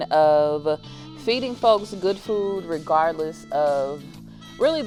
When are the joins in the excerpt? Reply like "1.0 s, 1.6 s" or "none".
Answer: none

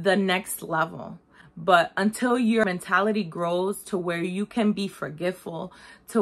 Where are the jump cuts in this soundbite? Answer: 2.6 s

